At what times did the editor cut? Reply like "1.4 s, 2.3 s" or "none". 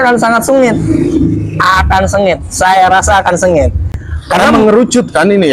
none